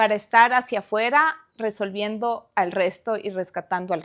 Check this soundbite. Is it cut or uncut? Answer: uncut